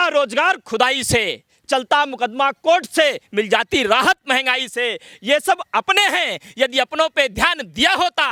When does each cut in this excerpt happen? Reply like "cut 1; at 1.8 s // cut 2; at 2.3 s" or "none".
none